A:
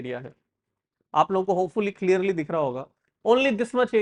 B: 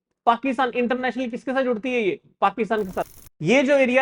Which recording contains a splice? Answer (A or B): B